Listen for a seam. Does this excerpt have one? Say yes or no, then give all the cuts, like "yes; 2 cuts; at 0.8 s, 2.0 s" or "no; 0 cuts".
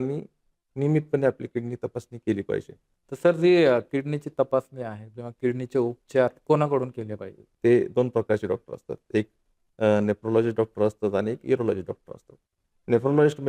no; 0 cuts